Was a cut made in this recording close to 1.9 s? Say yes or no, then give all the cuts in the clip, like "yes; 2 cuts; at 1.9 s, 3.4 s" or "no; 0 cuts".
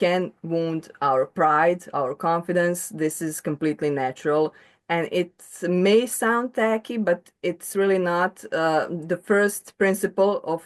no; 0 cuts